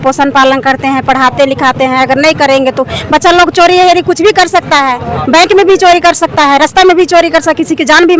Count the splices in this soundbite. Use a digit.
0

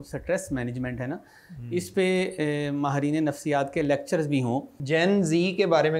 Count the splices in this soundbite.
1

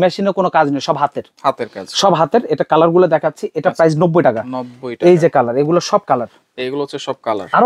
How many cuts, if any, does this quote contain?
0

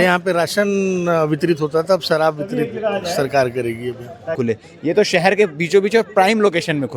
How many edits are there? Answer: 1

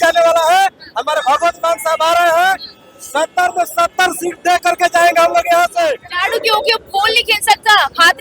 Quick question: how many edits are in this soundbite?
1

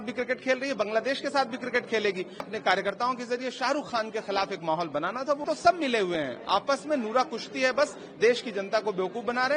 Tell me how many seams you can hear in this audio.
2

